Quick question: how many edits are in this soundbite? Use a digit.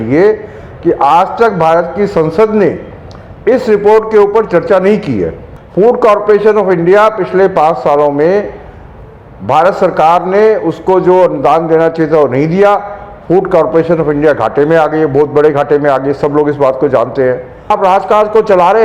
2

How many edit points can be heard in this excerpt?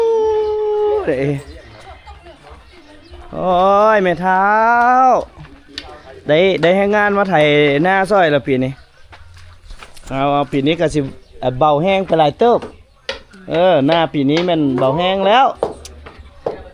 0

